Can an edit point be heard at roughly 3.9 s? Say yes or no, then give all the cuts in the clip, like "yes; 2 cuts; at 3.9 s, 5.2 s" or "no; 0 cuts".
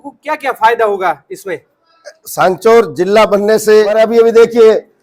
yes; 1 cut; at 3.9 s